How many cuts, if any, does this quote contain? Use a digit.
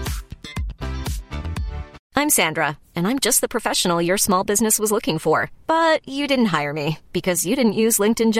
1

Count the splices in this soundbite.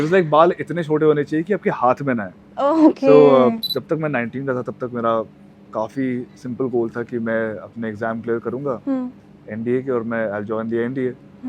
1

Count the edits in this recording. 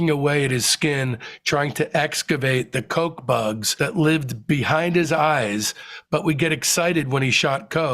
1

